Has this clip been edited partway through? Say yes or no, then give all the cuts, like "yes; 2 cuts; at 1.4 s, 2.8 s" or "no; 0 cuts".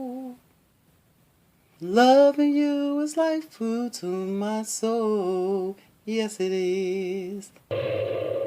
yes; 1 cut; at 7.6 s